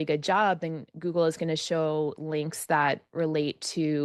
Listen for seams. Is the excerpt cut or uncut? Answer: uncut